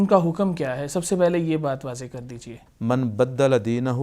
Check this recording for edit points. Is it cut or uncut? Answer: cut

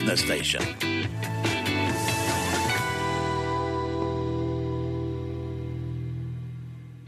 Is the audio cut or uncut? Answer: uncut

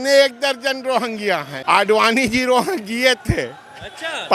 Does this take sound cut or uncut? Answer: cut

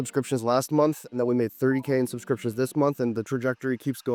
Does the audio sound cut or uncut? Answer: uncut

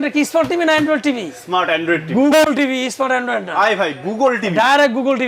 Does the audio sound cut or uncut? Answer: uncut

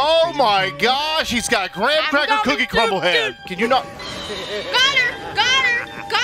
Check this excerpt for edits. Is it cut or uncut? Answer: cut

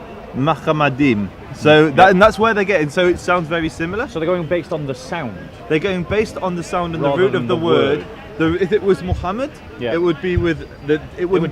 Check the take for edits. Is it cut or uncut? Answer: uncut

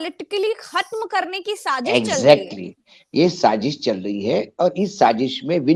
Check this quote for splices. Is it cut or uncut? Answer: uncut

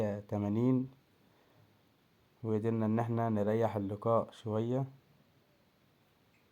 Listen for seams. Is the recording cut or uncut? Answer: uncut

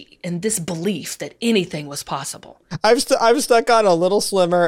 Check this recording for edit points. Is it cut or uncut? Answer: cut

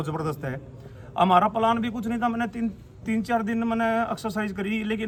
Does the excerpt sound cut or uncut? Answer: uncut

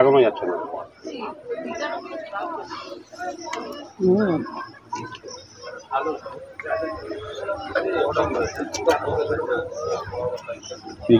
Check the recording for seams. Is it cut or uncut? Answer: uncut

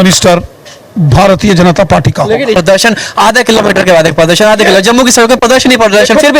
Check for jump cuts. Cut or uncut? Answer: cut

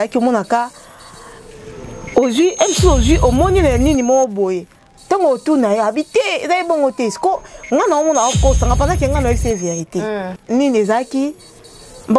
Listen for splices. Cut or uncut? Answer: cut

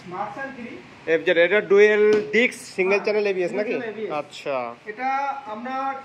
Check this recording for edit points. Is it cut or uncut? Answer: uncut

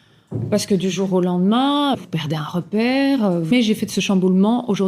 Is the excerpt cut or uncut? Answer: cut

